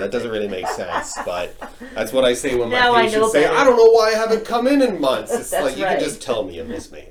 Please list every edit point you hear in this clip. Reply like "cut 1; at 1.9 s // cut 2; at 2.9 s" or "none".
none